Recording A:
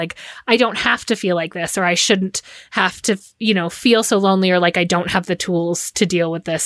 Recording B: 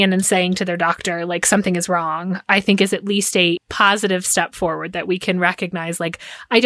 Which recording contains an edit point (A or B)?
B